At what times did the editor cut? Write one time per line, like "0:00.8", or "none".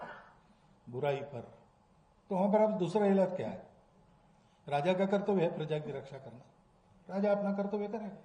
none